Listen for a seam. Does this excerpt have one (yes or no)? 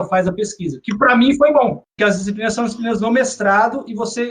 yes